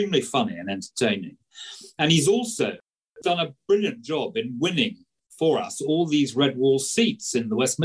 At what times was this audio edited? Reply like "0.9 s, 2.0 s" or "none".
none